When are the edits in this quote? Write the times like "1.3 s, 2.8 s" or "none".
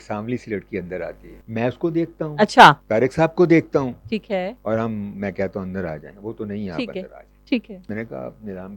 1.4 s, 2.8 s, 4.6 s, 7.8 s